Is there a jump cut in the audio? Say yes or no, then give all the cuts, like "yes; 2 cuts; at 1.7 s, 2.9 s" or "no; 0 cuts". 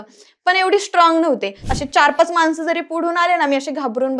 yes; 1 cut; at 1.7 s